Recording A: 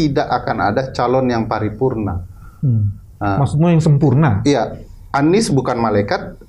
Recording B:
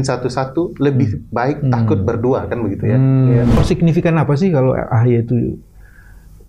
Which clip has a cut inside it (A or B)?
B